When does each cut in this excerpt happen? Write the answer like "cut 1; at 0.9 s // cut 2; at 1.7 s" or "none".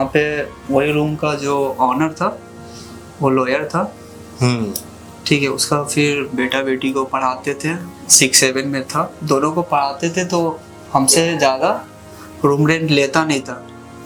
none